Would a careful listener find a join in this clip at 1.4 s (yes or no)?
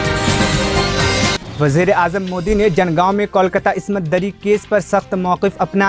yes